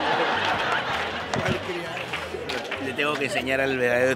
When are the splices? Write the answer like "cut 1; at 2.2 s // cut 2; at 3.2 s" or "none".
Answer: none